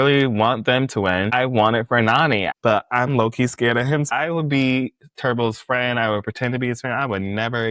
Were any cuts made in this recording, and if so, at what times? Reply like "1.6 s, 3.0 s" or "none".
1.3 s, 2.5 s, 4.1 s